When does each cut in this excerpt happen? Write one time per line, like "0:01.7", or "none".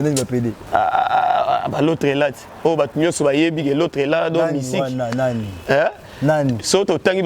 none

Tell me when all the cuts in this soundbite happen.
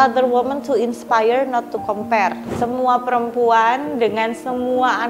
0:02.4

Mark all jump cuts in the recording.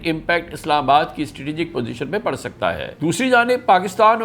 0:02.9

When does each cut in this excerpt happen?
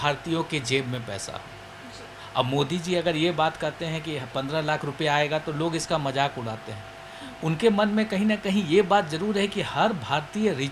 none

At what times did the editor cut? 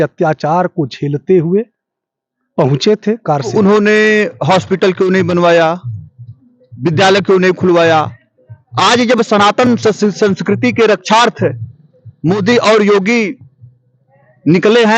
0:03.5

